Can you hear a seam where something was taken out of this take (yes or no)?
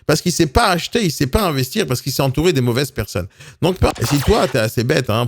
yes